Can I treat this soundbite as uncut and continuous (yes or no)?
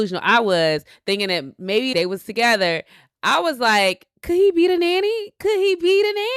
no